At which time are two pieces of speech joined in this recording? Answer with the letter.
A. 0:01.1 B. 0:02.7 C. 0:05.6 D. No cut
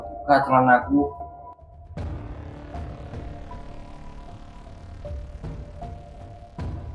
A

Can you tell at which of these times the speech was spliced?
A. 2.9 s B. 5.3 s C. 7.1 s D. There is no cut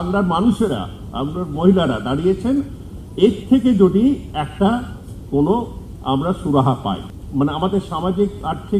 C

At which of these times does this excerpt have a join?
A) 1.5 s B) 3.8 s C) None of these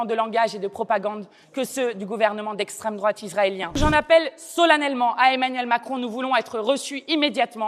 B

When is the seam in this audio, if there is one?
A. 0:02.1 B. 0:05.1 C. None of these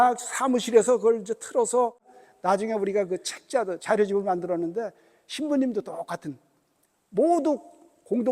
A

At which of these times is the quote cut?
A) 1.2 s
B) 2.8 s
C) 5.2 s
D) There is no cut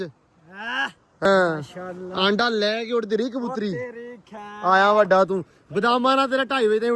A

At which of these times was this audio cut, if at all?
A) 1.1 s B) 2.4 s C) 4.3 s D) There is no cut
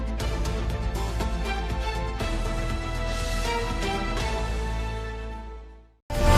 D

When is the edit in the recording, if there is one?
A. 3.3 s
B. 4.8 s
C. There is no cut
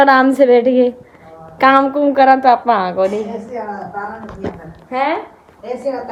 C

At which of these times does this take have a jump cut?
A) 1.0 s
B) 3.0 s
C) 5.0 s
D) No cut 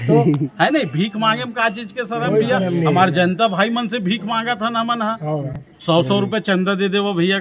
D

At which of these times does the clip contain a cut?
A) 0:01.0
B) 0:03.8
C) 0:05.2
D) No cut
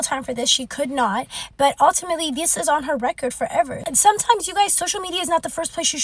B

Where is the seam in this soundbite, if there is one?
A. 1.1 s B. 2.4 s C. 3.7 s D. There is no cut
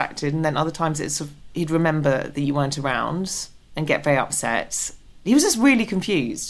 D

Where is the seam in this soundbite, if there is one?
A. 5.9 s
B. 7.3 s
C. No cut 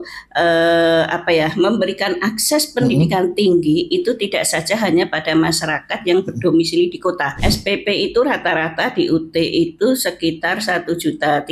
B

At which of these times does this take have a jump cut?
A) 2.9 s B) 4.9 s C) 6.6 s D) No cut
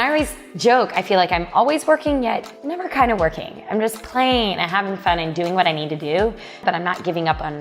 C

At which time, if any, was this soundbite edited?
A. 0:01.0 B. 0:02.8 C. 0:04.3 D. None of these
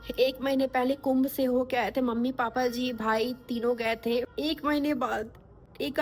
C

